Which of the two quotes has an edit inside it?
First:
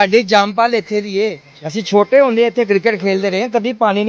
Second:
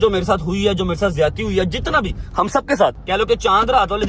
second; 1 cut; at 3.0 s

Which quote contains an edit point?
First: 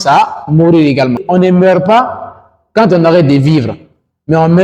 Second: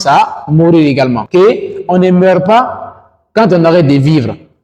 first; 1 cut; at 1.2 s

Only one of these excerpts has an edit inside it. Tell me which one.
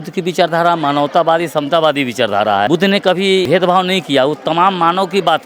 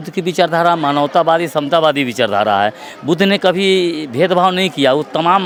first; 2 cuts; at 2.7 s, 3.4 s

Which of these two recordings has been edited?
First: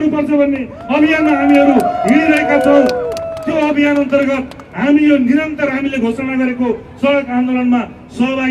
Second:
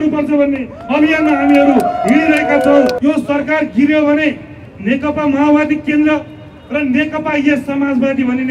second; 2 cuts; at 3.0 s, 4.6 s

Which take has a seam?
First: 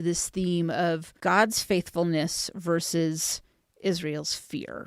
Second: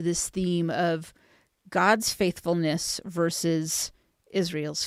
first; 1 cut; at 1.1 s

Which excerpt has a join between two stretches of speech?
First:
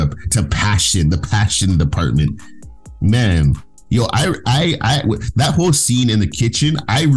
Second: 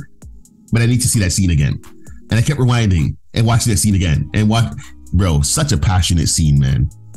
first; 1 cut; at 3.7 s

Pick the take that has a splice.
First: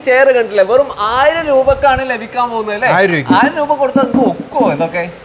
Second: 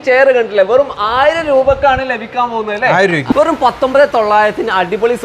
second; 1 cut; at 3.3 s

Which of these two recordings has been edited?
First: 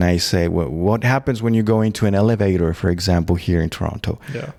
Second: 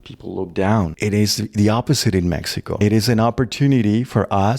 second; 2 cuts; at 0.9 s, 2.7 s

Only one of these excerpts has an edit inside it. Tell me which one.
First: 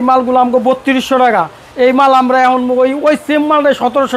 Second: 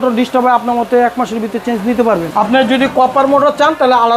second; 1 cut; at 2.3 s

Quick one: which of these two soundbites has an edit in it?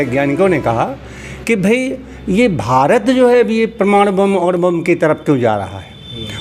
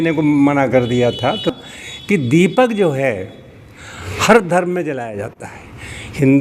second; 1 cut; at 1.5 s

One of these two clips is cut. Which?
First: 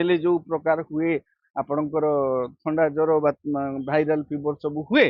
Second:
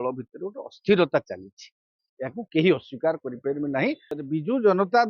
second; 1 cut; at 4.1 s

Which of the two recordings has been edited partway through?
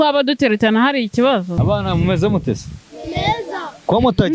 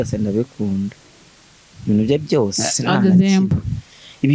first; 1 cut; at 1.6 s

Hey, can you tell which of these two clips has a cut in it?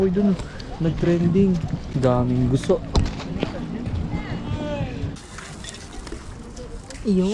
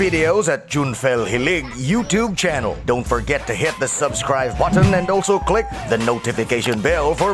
first; 2 cuts; at 1.8 s, 5.1 s

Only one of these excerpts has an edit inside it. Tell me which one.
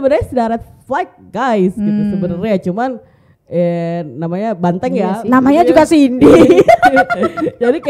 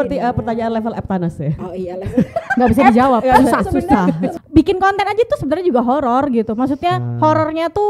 second; 1 cut; at 4.4 s

